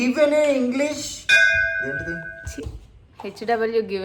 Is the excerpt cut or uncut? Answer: uncut